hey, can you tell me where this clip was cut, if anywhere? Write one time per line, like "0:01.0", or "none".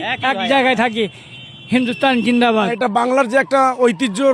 0:02.7